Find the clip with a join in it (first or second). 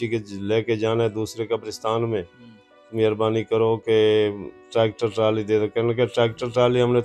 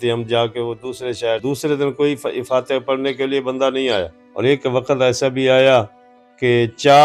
second